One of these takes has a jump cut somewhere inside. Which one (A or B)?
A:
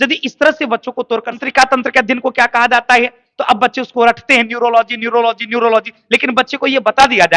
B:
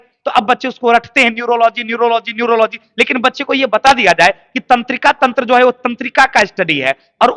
A